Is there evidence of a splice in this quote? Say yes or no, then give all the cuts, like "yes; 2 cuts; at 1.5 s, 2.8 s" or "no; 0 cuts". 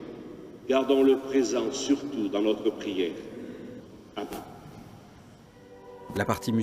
yes; 1 cut; at 2.2 s